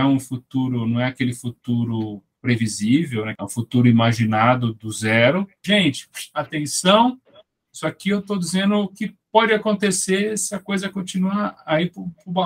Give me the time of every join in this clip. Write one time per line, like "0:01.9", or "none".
0:05.6